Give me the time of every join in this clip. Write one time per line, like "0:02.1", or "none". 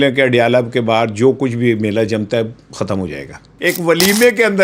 0:03.5